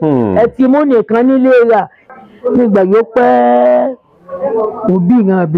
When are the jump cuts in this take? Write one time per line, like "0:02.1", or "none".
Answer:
0:02.0